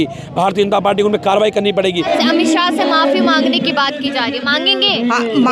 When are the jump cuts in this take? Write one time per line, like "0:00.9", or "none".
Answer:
0:02.1